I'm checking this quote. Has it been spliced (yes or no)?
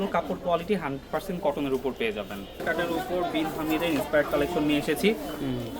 yes